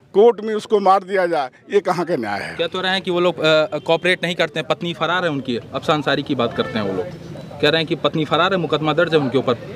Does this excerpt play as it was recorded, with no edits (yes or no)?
yes